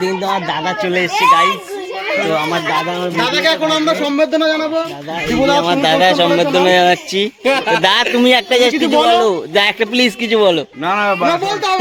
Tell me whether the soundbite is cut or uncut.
uncut